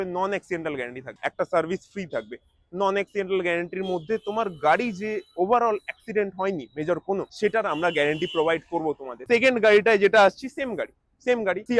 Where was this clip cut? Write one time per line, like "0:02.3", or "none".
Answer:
none